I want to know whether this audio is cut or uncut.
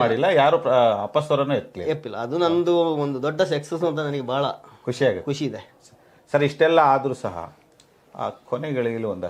uncut